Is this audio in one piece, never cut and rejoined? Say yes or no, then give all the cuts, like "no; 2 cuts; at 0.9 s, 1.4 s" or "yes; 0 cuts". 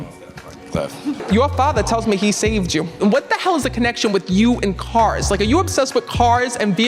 no; 2 cuts; at 1.2 s, 3.0 s